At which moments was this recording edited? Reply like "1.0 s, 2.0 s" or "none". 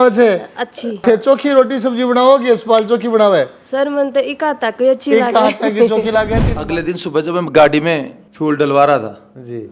1.0 s, 6.5 s